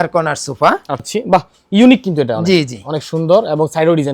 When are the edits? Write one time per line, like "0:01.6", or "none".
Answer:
0:01.1